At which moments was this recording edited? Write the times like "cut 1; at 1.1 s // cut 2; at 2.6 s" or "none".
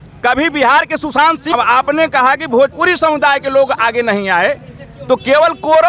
cut 1; at 1.5 s